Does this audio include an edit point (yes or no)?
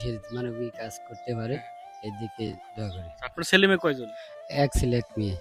no